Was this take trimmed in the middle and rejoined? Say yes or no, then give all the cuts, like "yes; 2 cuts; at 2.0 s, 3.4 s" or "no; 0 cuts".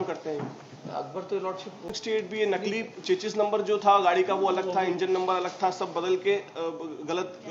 yes; 1 cut; at 1.9 s